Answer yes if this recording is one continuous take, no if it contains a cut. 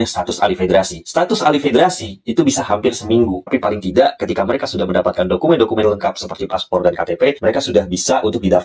no